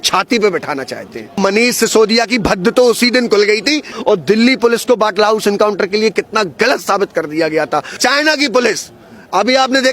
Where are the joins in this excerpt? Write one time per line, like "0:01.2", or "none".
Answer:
0:01.4
0:03.9
0:07.9